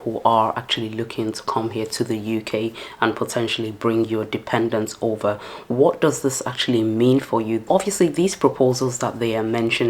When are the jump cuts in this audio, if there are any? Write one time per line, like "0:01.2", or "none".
0:07.7